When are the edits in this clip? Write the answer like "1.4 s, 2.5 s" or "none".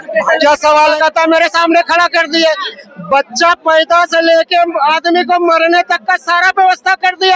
0.9 s